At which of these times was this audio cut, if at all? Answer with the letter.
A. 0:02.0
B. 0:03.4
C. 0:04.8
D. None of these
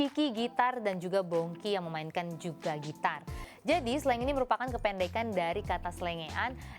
B